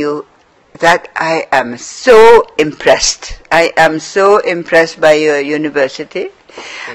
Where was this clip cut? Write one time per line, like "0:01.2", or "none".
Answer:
0:05.6